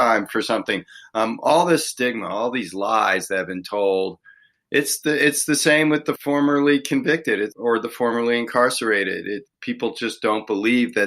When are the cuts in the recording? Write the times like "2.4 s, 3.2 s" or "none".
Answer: 6.1 s, 7.5 s, 9.5 s